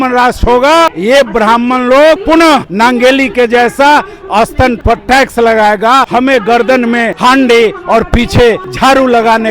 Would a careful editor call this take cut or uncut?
cut